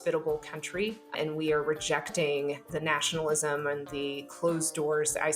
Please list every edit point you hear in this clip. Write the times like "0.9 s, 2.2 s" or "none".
1.0 s

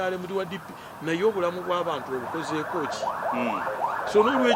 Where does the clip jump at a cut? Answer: none

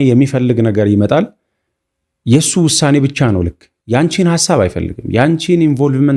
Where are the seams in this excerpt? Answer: none

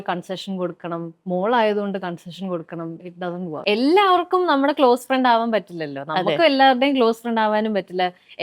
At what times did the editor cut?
3.5 s

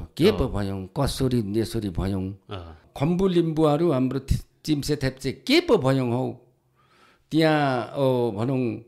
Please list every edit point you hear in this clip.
2.8 s

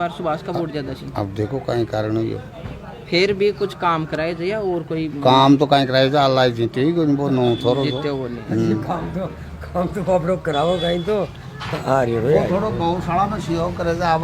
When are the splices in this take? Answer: none

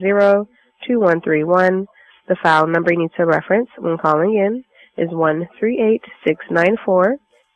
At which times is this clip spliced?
3.8 s

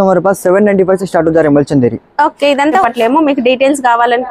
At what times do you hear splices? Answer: 2.8 s

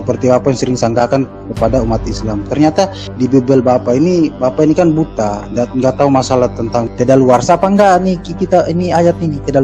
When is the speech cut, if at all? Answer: 3.0 s, 6.9 s

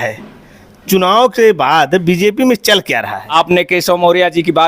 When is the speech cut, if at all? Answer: 3.3 s

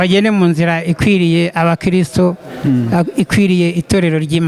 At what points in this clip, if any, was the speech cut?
none

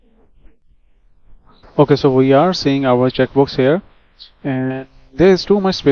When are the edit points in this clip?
none

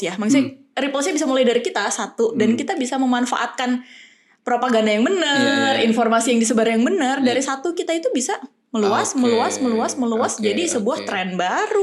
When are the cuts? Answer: none

